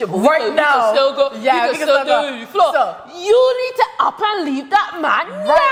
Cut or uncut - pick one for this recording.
uncut